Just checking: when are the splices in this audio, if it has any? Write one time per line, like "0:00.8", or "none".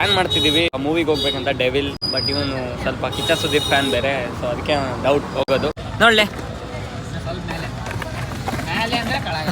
0:00.8
0:02.0
0:05.8